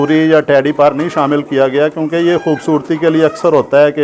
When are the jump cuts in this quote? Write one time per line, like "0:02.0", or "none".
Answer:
none